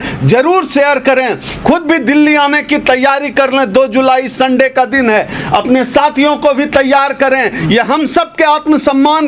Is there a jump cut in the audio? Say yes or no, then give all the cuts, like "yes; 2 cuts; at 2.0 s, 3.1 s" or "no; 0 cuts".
no; 0 cuts